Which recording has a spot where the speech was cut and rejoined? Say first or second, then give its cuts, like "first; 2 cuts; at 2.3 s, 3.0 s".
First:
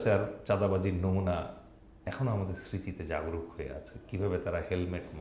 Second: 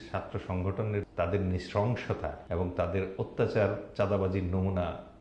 second; 2 cuts; at 1.1 s, 2.4 s